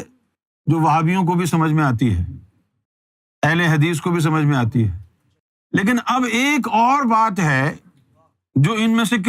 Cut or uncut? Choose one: uncut